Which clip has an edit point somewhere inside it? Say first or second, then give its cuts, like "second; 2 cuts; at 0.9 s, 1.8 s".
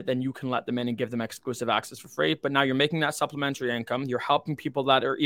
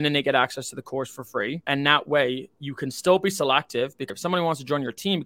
second; 2 cuts; at 1.6 s, 4.1 s